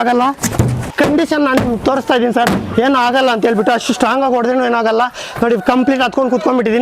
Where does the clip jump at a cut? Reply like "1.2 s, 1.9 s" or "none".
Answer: 0.9 s